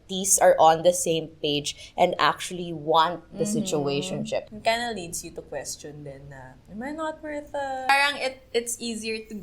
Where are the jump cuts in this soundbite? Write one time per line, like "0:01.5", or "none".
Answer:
0:04.5
0:07.9